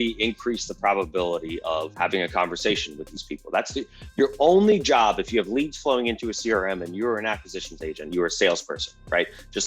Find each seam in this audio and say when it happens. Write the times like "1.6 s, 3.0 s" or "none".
1.9 s